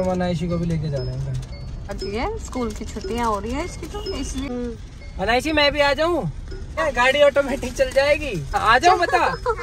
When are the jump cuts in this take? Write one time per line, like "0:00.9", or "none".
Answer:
0:01.9
0:04.5
0:06.8
0:08.6